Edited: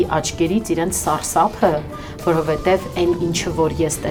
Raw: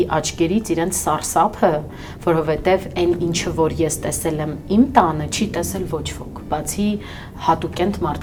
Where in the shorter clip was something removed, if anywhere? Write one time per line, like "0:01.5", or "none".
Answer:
none